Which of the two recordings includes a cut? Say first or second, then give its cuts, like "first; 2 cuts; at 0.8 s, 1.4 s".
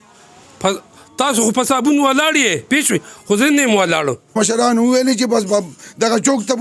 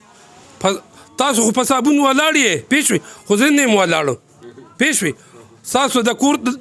first; 1 cut; at 4.3 s